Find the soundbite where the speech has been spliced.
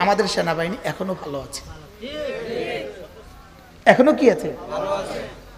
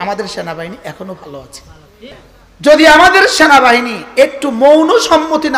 second; 1 cut; at 2.1 s

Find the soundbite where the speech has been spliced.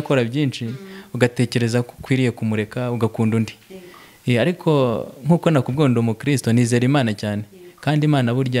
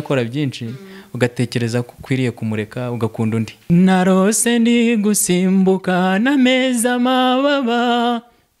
second; 1 cut; at 3.7 s

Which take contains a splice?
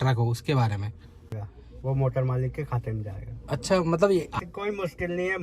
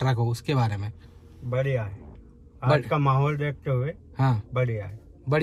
first; 2 cuts; at 1.4 s, 4.4 s

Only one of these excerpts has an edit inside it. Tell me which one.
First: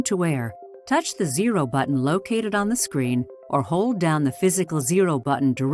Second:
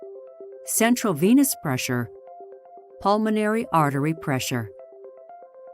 second; 1 cut; at 4.7 s

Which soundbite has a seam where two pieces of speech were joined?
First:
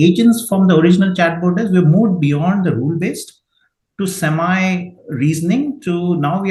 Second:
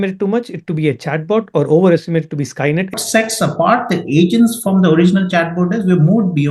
second; 1 cut; at 3.0 s

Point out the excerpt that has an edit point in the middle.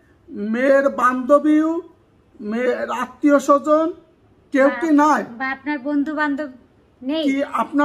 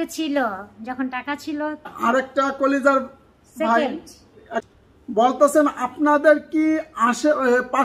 second; 2 cuts; at 1.9 s, 4.7 s

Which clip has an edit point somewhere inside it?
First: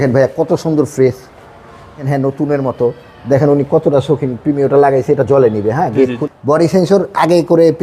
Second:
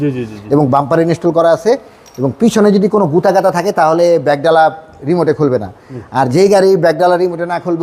first; 2 cuts; at 2.1 s, 6.2 s

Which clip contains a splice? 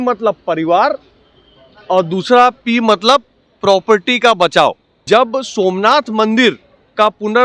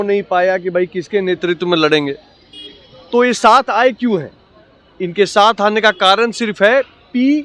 first; 1 cut; at 4.9 s

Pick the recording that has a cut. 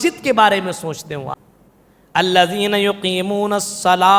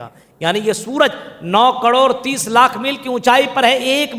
first; 1 cut; at 1.3 s

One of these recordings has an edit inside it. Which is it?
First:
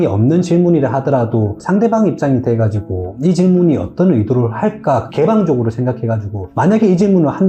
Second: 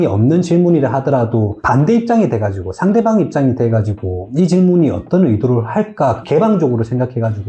first; 1 cut; at 1.5 s

